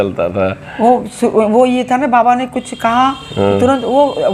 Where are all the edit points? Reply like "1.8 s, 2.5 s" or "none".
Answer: none

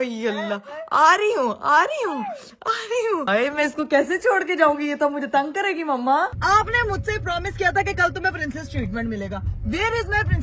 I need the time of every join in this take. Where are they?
3.2 s, 6.3 s

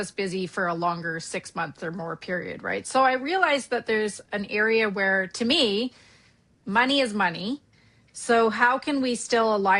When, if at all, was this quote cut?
2.8 s

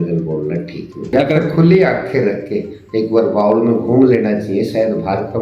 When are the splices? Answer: 1.1 s

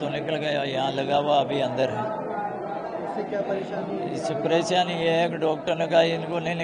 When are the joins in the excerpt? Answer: none

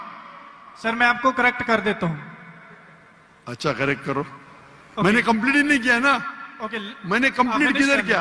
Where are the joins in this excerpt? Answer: none

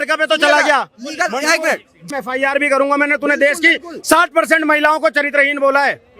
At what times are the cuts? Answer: 2.1 s

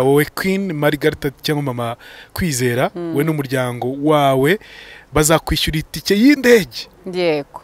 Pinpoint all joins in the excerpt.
none

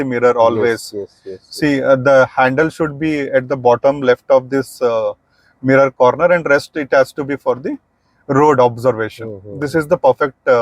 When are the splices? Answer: none

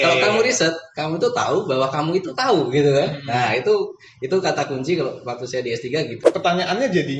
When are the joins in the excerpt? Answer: 6.2 s

